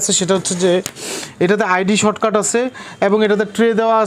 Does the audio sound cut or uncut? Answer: uncut